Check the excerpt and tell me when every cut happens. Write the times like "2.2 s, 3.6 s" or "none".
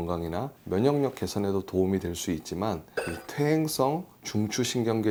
none